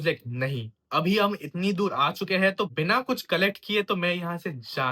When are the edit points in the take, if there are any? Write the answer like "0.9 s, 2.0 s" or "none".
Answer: none